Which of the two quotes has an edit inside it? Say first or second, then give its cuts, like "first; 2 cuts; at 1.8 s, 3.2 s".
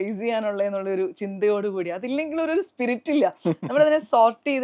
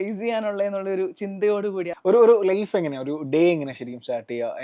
second; 1 cut; at 1.9 s